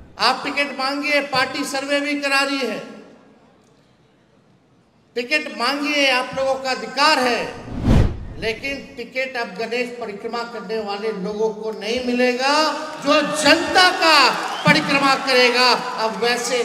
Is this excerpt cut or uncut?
uncut